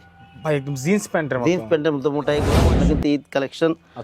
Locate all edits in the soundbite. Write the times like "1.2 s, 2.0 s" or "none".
2.6 s